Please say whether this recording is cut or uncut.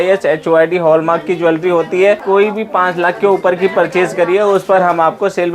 cut